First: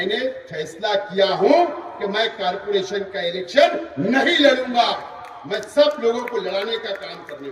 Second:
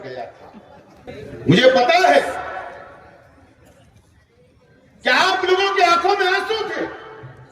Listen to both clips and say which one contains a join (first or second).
second